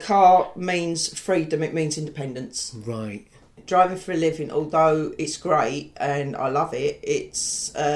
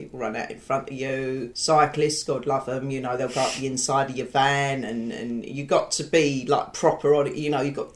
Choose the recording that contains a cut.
first; 1 cut; at 3.6 s

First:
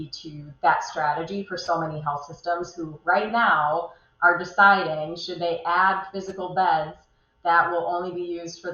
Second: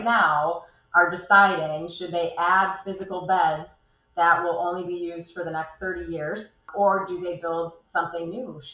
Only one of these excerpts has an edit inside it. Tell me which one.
second; 1 cut; at 6.7 s

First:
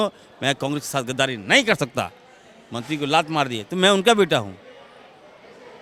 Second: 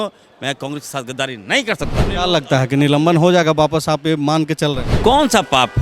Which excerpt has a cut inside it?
second; 2 cuts; at 2.1 s, 4.9 s

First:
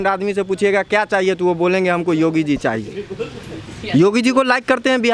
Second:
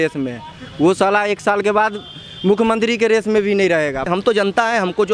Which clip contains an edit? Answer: second; 1 cut; at 4.1 s

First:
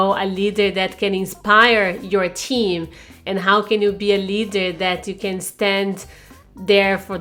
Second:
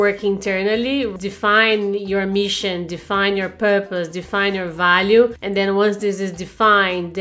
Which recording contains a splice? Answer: second; 2 cuts; at 1.1 s, 5.4 s

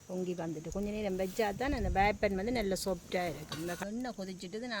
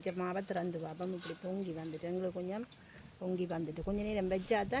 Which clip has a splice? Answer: first; 1 cut; at 3.8 s

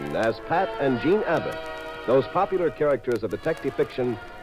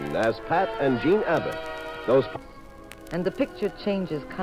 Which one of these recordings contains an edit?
first; 1 cut; at 2.3 s

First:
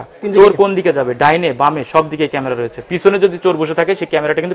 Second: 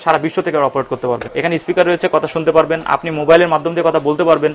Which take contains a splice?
second; 1 cut; at 1.3 s

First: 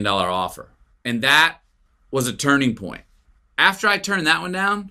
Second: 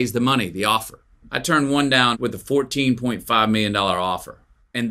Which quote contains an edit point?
second; 1 cut; at 2.2 s

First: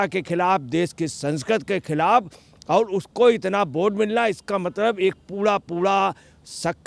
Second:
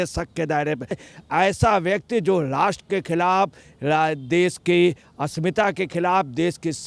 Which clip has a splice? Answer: second; 1 cut; at 1.1 s

